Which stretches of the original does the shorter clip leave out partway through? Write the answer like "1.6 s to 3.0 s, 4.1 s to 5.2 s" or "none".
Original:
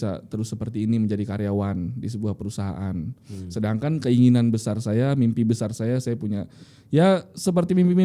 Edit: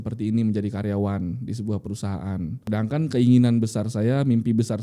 3.2 s to 3.6 s